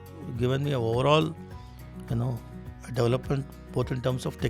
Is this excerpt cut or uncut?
uncut